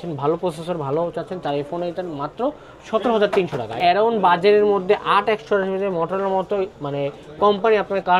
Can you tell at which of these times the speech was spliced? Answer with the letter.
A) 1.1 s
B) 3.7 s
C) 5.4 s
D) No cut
B